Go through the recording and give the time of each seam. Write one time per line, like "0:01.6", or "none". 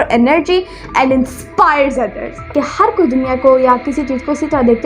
0:02.5